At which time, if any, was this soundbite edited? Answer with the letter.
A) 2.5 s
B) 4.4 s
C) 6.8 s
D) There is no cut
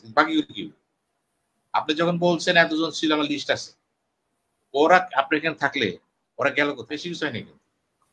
C